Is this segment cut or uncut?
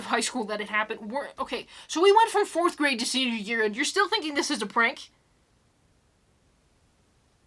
uncut